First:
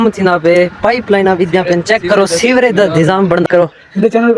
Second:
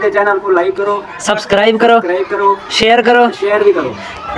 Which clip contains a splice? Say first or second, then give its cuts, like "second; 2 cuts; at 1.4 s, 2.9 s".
first; 1 cut; at 3.4 s